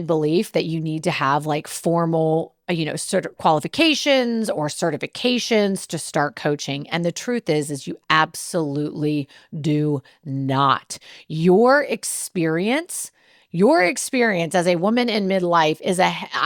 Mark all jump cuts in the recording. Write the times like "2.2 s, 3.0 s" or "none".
none